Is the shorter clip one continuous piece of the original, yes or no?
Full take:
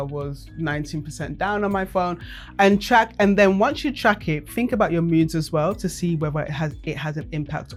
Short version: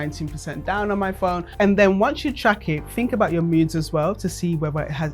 no